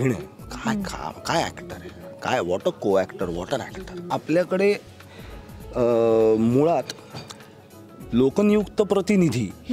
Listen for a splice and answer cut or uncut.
cut